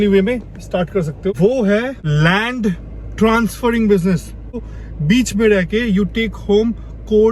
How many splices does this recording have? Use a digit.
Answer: 3